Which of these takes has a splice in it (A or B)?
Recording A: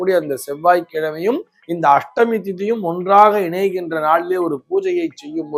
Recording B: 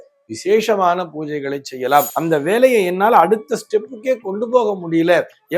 B